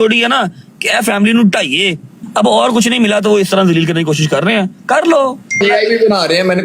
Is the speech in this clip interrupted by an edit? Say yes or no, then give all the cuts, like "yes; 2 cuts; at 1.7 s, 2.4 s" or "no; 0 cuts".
yes; 2 cuts; at 2.2 s, 5.6 s